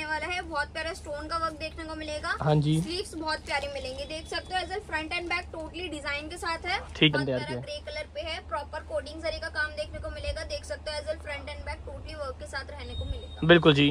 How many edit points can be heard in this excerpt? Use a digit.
1